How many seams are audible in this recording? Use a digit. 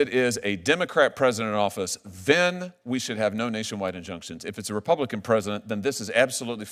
0